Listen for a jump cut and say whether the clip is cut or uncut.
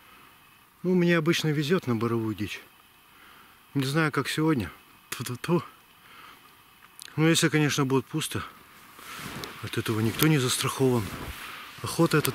uncut